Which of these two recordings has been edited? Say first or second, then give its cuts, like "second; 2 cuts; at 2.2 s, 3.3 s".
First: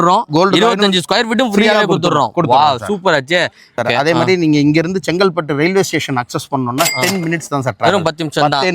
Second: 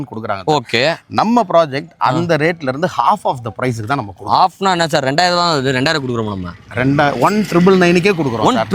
first; 1 cut; at 3.8 s